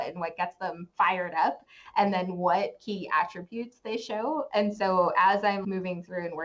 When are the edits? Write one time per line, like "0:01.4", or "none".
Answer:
none